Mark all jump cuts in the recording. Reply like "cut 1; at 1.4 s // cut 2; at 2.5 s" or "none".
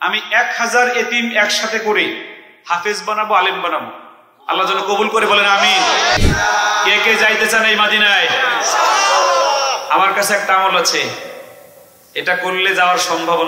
cut 1; at 6.2 s